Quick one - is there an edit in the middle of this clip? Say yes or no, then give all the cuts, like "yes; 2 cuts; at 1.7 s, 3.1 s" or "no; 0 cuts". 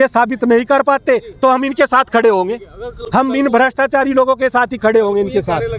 no; 0 cuts